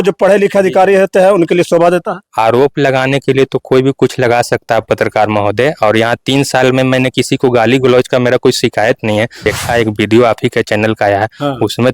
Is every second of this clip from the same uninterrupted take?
no; 1 cut; at 9.4 s

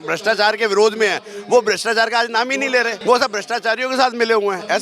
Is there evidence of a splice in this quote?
yes; 1 cut; at 2.9 s

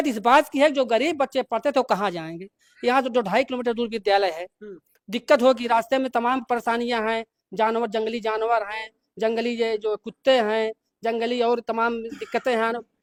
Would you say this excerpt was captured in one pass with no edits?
yes; 0 cuts

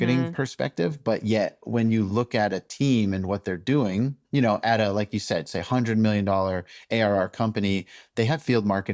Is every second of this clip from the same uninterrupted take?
yes; 0 cuts

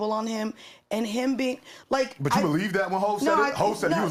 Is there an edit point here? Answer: no; 0 cuts

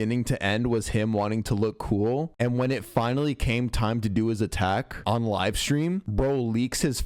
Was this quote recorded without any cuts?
yes; 0 cuts

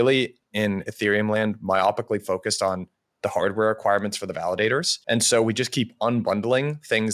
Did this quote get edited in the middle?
yes; 1 cut; at 4.9 s

